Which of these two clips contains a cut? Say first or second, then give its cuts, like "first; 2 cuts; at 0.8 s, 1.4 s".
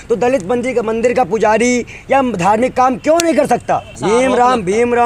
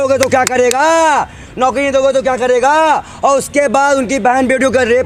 first; 1 cut; at 3.9 s